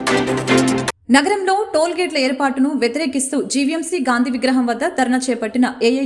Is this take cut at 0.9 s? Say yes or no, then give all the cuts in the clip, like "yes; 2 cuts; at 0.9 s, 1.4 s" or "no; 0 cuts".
yes; 1 cut; at 0.9 s